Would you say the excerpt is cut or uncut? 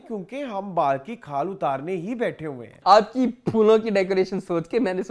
cut